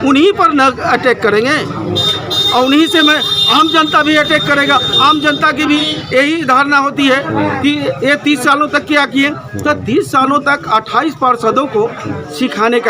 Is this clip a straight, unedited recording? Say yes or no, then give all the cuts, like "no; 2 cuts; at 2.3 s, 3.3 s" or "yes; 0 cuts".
yes; 0 cuts